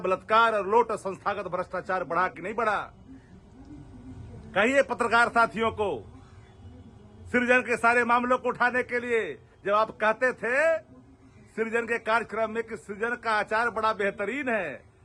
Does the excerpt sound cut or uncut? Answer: uncut